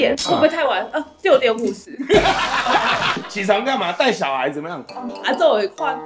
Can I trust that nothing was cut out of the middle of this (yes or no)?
no